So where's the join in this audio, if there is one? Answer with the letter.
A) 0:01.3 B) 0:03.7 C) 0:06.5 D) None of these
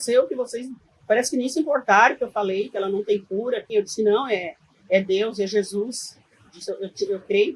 B